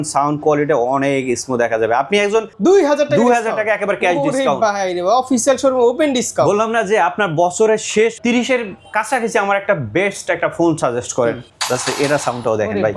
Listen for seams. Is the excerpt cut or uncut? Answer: cut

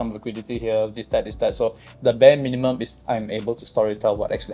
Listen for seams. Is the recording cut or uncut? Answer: uncut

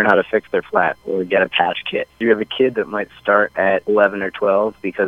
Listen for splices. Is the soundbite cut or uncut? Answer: cut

